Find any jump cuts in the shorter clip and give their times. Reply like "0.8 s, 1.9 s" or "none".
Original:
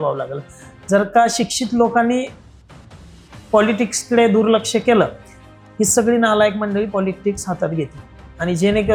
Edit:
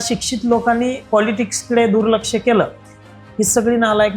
1.0 s